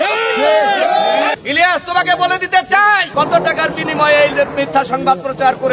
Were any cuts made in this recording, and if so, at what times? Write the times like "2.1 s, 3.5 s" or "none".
1.4 s, 3.1 s